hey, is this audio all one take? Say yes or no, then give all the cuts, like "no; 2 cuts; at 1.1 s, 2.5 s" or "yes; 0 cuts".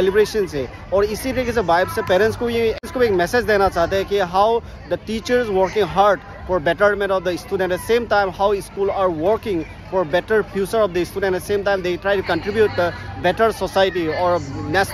yes; 0 cuts